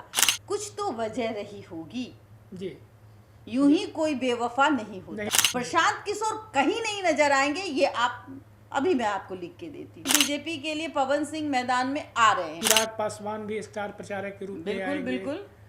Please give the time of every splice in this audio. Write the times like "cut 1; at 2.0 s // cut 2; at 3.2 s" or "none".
cut 1; at 5.3 s // cut 2; at 10.1 s // cut 3; at 12.6 s